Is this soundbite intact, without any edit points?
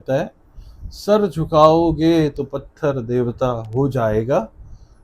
yes; 0 cuts

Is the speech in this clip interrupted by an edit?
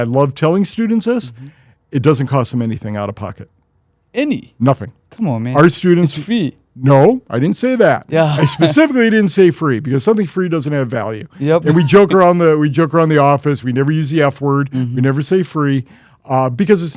no; 0 cuts

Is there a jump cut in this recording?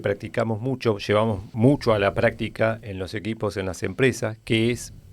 yes; 1 cut; at 1.5 s

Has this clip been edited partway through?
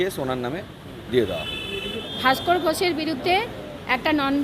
yes; 1 cut; at 2.0 s

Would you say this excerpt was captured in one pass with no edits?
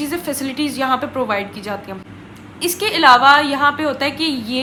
yes; 0 cuts

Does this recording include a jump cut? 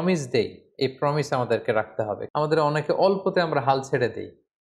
yes; 1 cut; at 2.2 s

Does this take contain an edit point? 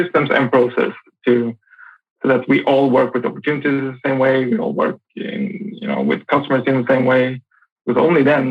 no; 0 cuts

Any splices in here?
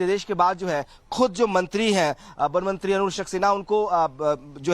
yes; 1 cut; at 3.2 s

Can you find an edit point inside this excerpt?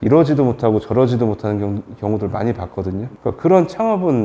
no; 0 cuts

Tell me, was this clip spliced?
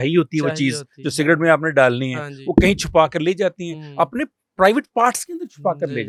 no; 0 cuts

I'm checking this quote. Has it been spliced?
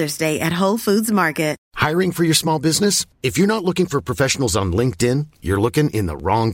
yes; 1 cut; at 1.7 s

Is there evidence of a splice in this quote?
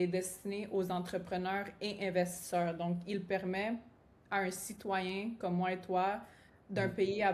no; 0 cuts

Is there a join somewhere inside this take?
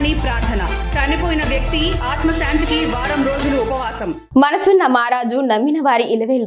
yes; 1 cut; at 4.3 s

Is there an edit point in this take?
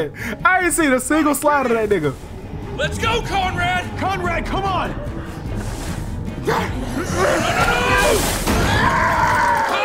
no; 0 cuts

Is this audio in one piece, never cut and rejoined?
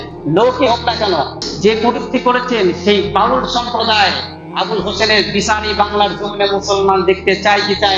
no; 1 cut; at 1.4 s

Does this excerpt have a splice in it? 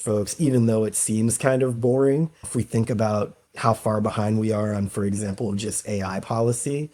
no; 0 cuts

